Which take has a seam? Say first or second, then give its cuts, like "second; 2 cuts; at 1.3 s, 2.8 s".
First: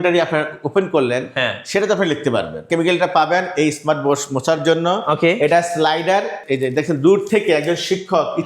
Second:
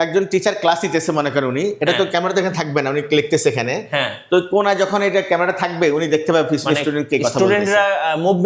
first; 2 cuts; at 2.6 s, 6.3 s